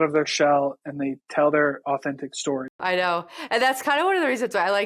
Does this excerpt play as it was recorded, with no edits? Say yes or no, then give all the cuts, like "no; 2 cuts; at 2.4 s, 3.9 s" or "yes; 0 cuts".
no; 1 cut; at 2.8 s